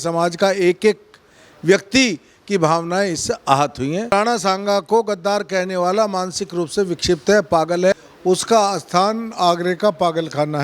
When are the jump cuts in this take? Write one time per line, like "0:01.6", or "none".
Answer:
0:04.1
0:07.9

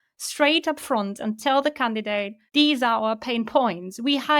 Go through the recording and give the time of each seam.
0:02.4

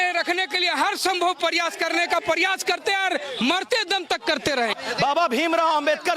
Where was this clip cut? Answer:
0:04.7

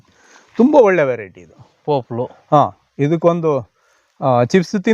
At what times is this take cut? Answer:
none

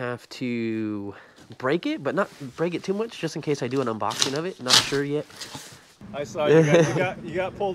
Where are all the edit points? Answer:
0:06.0

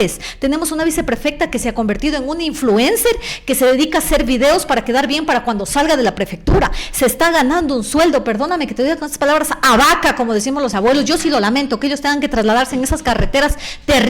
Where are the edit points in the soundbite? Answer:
0:10.7

